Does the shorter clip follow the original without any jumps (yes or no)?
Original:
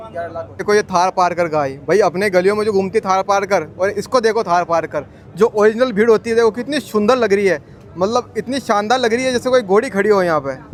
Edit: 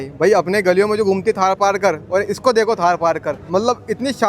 no